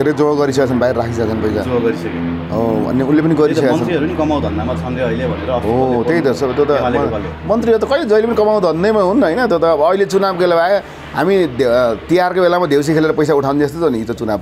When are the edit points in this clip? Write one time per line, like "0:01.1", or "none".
none